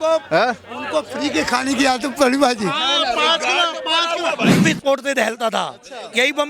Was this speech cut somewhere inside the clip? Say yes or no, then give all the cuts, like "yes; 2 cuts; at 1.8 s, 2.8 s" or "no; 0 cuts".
yes; 1 cut; at 4.6 s